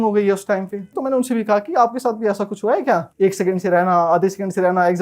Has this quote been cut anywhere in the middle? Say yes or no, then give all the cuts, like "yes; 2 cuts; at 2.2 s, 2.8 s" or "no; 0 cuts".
yes; 2 cuts; at 0.9 s, 3.1 s